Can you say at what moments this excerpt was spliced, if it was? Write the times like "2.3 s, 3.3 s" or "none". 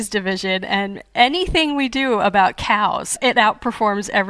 3.2 s